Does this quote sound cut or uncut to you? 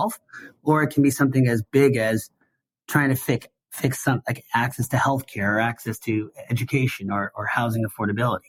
uncut